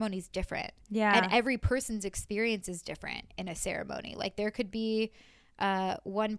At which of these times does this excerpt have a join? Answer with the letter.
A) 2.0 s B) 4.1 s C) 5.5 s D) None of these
D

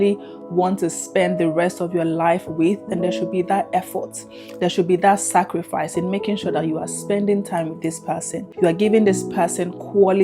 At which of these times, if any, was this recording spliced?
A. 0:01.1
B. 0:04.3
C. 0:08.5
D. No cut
C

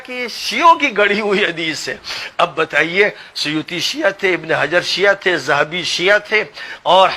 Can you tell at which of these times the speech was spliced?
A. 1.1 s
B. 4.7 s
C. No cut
C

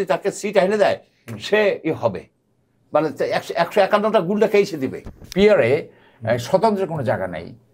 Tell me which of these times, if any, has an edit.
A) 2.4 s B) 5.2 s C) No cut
B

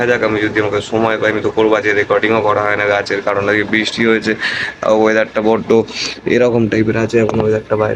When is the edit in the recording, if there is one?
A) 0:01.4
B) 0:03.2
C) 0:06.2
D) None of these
D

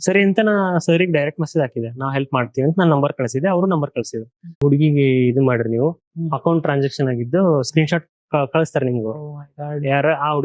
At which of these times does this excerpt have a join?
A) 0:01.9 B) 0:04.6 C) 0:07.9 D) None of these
B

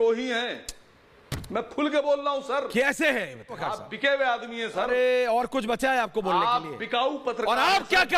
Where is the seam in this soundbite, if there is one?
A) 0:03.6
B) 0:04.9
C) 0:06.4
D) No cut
A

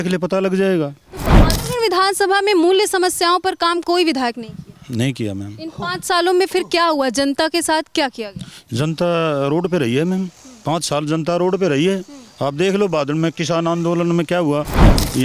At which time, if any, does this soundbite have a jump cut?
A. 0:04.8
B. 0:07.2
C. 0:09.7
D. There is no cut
D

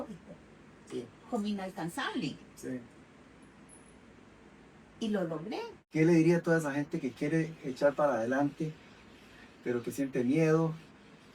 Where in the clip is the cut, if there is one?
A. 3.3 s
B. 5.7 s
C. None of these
B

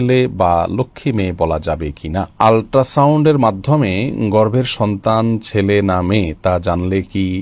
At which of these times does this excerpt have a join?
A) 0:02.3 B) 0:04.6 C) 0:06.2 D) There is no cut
A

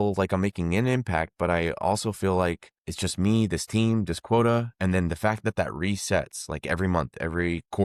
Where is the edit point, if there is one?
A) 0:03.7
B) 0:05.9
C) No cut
C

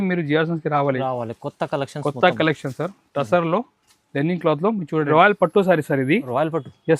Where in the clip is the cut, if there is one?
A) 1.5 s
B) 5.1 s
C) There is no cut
B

